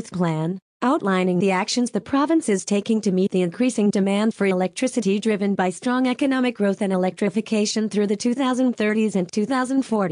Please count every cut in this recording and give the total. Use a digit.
1